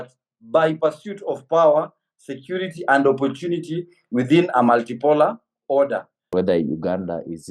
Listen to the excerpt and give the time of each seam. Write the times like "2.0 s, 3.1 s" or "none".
6.3 s